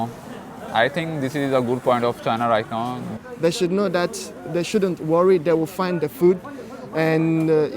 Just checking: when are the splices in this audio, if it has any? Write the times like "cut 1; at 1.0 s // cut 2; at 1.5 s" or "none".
cut 1; at 3.2 s